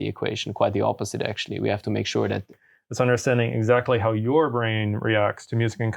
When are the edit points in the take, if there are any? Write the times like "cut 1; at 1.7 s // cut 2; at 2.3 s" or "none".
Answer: cut 1; at 2.6 s